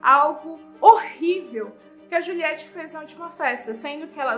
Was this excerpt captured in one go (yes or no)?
yes